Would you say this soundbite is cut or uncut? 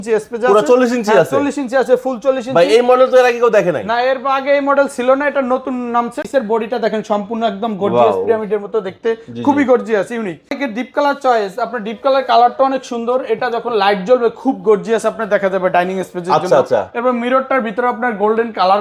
cut